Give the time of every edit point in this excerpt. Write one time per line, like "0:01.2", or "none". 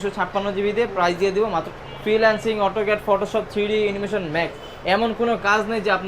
0:01.7